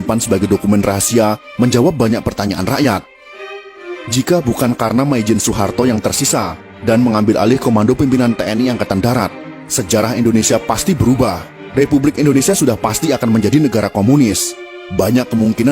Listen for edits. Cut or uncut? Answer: uncut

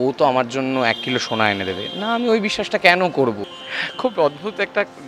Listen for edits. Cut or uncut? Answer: cut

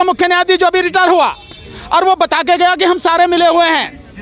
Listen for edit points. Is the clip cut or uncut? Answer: uncut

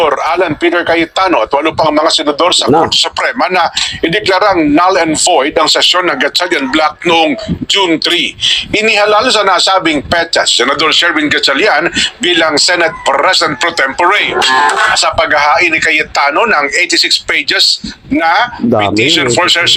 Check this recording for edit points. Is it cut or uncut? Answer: uncut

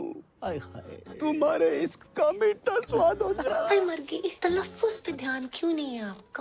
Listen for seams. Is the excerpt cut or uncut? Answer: cut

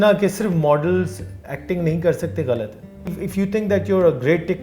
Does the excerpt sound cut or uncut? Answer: cut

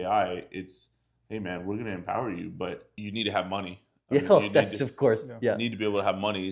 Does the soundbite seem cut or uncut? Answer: cut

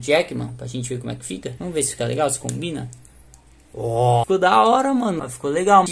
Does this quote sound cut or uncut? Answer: cut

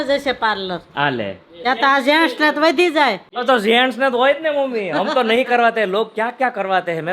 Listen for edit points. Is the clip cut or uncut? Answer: uncut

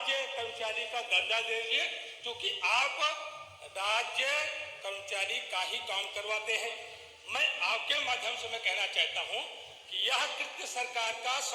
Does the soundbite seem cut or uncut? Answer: uncut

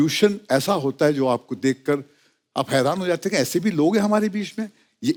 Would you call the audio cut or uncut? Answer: uncut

